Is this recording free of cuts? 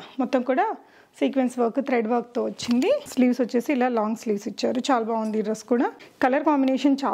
no; 1 cut; at 6.0 s

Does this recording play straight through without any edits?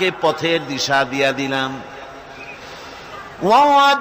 yes; 0 cuts

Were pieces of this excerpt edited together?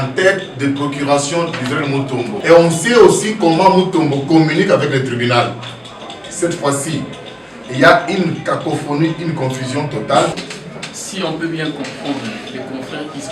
yes; 2 cuts; at 2.4 s, 10.3 s

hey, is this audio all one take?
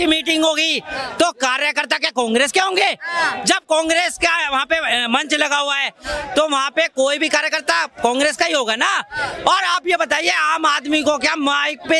yes; 0 cuts

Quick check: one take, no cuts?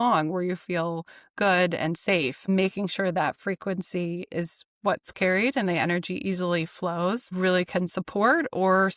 no; 2 cuts; at 2.5 s, 7.3 s

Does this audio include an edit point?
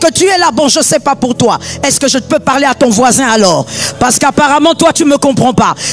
no; 0 cuts

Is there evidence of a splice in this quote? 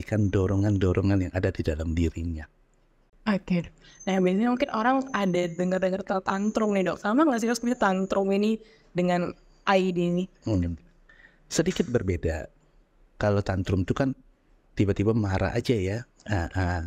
yes; 1 cut; at 3.1 s

